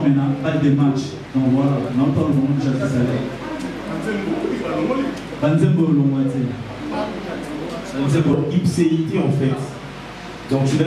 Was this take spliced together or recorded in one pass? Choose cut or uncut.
cut